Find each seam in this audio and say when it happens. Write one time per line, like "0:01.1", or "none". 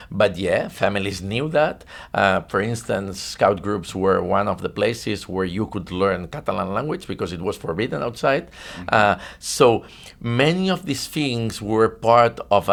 none